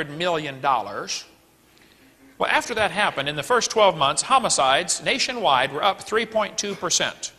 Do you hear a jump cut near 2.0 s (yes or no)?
no